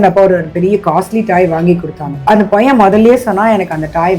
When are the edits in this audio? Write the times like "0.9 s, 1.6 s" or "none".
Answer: 2.2 s